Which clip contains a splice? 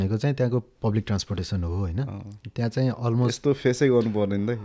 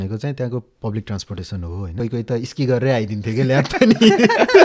second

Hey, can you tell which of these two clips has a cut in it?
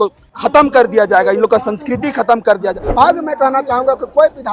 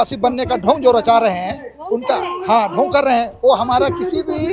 first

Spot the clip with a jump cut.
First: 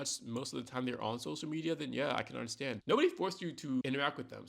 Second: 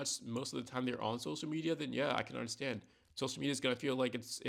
first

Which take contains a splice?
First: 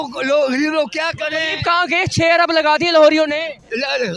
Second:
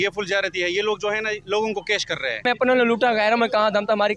second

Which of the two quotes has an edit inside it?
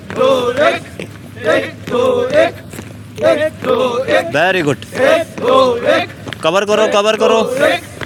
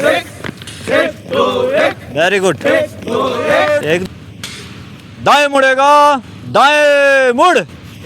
second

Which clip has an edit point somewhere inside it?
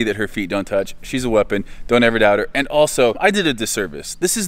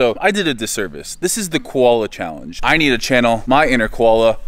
second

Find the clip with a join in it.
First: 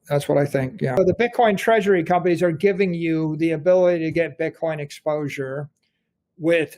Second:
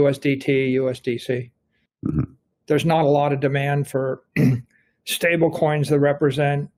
first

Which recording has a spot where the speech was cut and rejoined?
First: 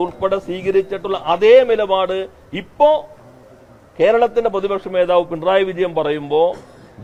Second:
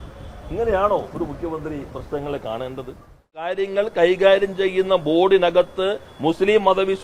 second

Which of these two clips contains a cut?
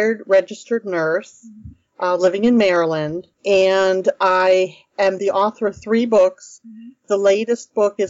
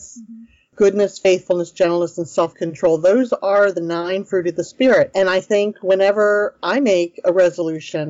second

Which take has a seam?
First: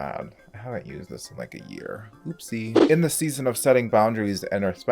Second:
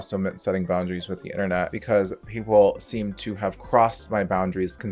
first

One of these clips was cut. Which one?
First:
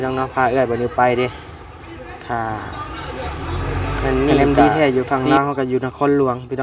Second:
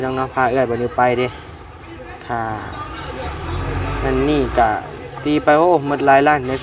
first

